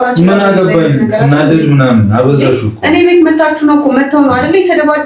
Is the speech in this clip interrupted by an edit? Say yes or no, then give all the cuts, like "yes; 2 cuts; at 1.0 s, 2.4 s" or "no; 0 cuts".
no; 0 cuts